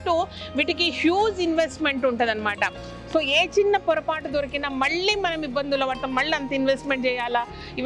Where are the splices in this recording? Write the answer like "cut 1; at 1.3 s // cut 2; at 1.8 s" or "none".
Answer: none